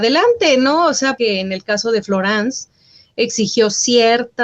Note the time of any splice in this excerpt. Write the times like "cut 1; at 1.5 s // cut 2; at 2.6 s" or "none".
cut 1; at 1.1 s